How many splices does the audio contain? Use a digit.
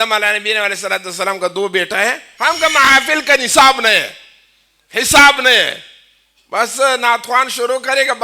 1